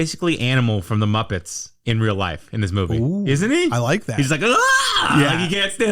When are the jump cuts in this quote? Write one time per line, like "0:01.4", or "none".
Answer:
none